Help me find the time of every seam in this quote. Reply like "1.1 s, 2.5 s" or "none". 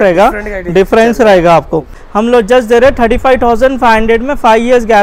2.0 s